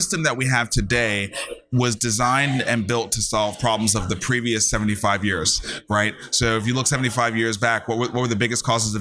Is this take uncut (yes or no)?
yes